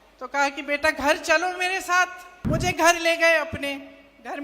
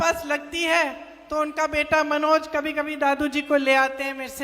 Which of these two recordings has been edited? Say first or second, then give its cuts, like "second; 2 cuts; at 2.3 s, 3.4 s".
first; 1 cut; at 2.3 s